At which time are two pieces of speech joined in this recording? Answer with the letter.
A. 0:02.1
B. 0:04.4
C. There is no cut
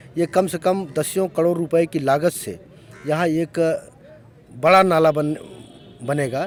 C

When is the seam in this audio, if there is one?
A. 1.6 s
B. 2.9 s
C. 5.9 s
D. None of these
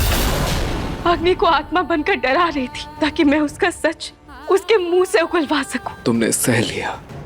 C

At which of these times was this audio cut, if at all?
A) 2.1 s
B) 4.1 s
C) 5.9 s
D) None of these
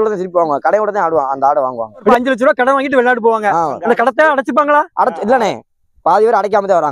A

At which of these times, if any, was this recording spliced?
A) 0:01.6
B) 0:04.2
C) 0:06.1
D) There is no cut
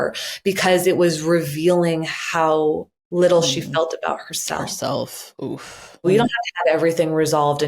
C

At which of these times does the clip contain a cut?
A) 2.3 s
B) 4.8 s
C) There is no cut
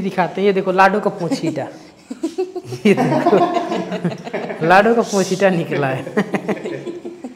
C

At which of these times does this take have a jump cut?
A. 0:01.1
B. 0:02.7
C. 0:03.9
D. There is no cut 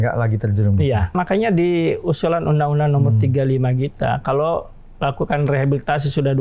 A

